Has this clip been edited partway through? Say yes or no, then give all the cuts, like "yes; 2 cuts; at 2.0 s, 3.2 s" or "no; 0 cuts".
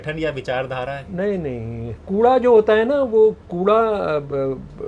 yes; 1 cut; at 2.0 s